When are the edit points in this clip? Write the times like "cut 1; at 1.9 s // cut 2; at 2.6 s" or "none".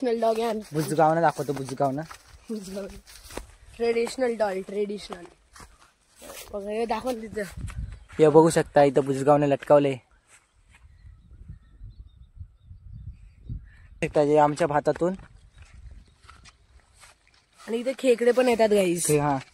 cut 1; at 14.0 s

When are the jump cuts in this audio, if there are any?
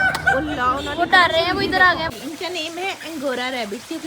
cut 1; at 2.1 s

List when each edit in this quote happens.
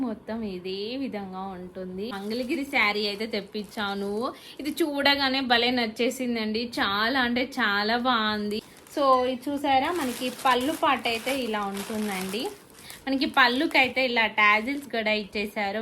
cut 1; at 2.2 s // cut 2; at 8.6 s

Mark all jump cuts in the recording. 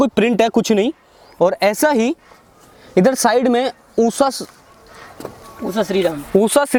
none

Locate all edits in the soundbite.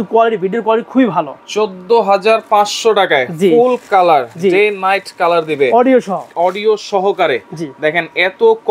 cut 1; at 1.3 s

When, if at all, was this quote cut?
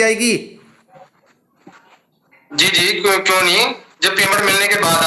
none

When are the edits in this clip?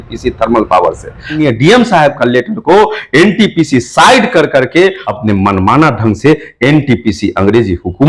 cut 1; at 1.4 s // cut 2; at 5.0 s

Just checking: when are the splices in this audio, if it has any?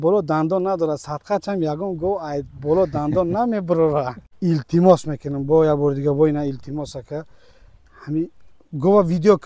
cut 1; at 4.2 s

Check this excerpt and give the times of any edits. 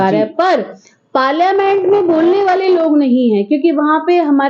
none

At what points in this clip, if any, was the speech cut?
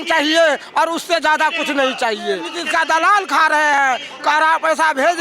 cut 1; at 2.5 s

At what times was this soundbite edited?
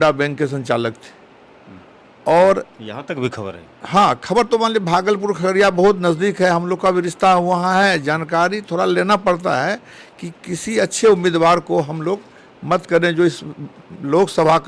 none

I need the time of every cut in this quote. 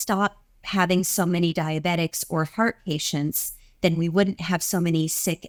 none

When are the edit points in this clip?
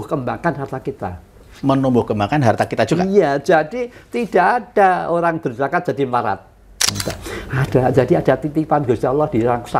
cut 1; at 7.0 s

